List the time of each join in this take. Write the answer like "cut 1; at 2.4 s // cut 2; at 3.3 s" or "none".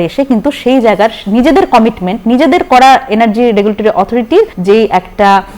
cut 1; at 4.6 s

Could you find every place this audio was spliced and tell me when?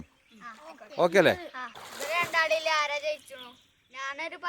cut 1; at 1.7 s

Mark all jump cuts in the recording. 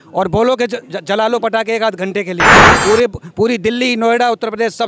none

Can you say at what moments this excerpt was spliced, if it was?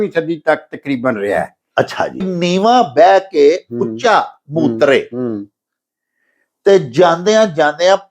cut 1; at 2.3 s

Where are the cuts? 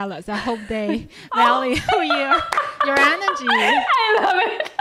none

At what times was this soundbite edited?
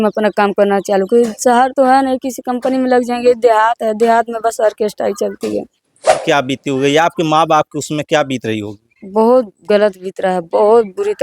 cut 1; at 6.2 s

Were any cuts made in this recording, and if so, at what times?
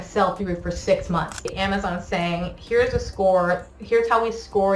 cut 1; at 1.5 s

